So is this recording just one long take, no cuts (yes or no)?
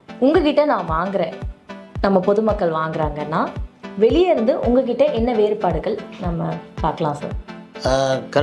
yes